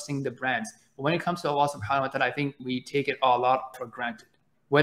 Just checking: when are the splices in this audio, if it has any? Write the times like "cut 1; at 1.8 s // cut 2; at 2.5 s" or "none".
cut 1; at 2.6 s // cut 2; at 3.8 s